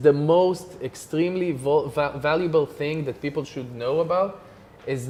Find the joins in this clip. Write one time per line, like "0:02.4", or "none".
none

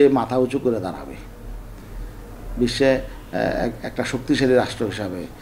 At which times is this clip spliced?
none

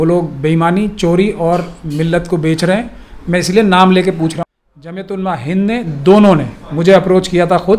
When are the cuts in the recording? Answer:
0:04.4

